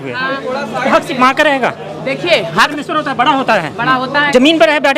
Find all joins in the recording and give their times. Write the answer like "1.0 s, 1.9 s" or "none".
2.7 s